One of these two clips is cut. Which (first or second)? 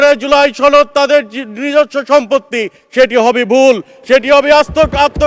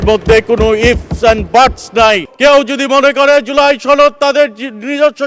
second